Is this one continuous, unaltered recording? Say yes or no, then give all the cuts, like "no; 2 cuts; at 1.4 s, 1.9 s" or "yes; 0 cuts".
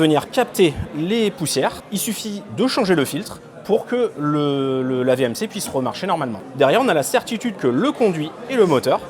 no; 2 cuts; at 1.8 s, 6.4 s